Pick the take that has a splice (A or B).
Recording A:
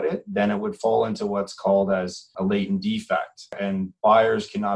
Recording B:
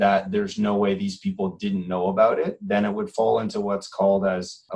A